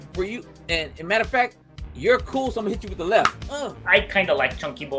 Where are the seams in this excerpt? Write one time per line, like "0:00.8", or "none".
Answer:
0:03.5

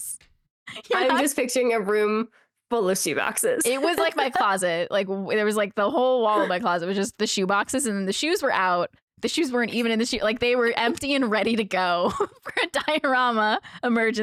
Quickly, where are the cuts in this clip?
none

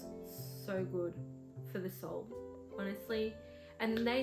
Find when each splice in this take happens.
none

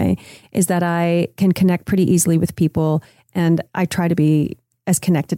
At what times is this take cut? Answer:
0:03.7

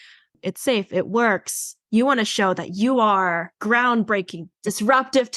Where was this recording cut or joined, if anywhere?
0:01.7
0:03.5
0:04.6

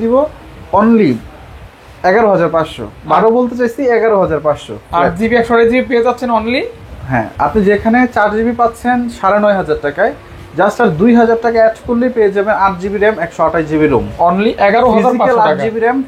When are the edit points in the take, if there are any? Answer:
none

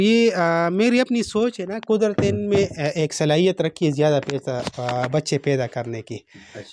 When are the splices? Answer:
none

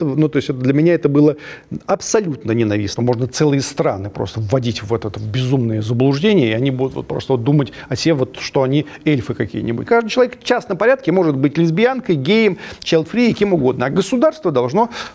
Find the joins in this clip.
0:02.9
0:09.9

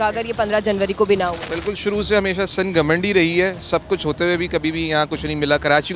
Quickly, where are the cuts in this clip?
none

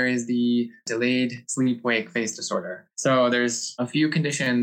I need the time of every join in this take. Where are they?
0:01.0
0:02.8
0:03.6

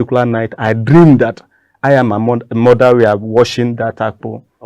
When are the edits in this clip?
none

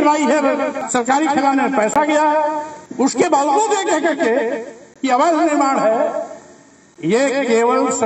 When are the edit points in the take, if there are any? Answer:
0:00.8
0:02.8

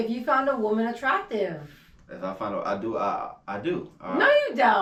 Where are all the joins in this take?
none

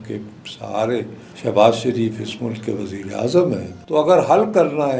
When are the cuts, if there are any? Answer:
0:01.2
0:03.7

